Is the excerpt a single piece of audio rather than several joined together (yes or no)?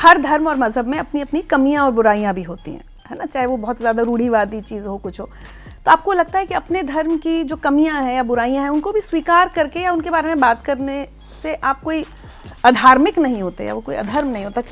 yes